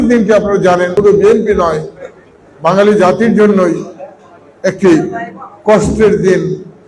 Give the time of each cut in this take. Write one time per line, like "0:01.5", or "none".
0:00.9

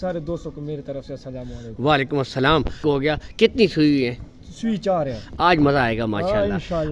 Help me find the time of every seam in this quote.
0:02.8

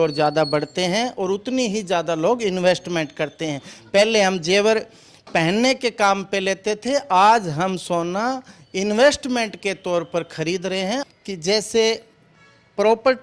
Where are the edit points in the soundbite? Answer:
0:11.1

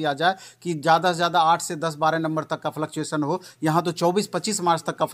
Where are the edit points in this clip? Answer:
none

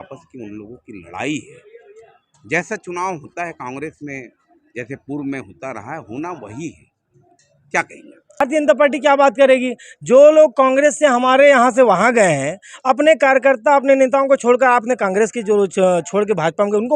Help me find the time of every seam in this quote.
0:08.4

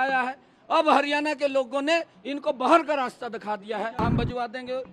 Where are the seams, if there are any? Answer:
0:04.0

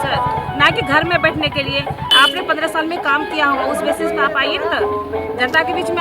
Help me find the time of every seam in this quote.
0:02.1

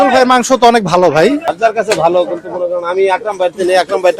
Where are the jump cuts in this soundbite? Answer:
0:01.5

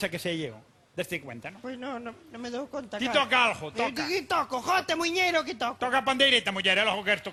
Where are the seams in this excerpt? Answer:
none

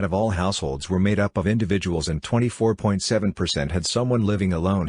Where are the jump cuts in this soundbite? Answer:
0:02.3
0:03.7

